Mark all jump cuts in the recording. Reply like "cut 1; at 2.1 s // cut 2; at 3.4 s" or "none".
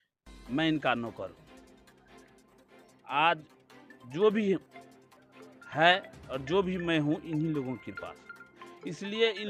none